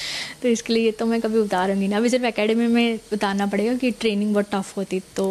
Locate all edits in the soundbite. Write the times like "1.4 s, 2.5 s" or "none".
none